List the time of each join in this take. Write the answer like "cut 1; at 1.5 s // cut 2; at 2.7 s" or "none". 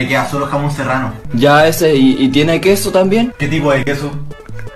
cut 1; at 1.2 s